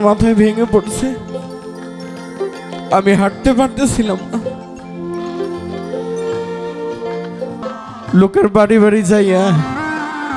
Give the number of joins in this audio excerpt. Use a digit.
1